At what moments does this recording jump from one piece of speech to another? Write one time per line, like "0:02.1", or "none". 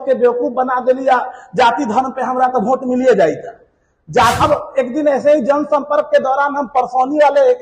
0:04.4